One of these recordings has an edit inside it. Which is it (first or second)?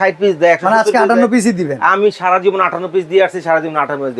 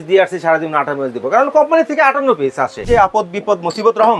second